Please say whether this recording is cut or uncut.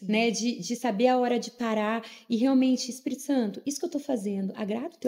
uncut